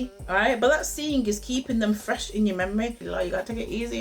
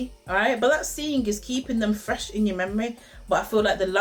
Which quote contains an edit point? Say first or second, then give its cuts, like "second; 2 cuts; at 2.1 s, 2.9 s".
first; 1 cut; at 3.0 s